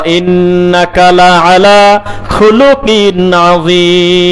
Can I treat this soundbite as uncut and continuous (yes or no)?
yes